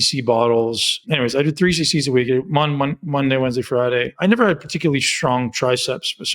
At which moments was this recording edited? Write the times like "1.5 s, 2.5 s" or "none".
1.0 s, 4.1 s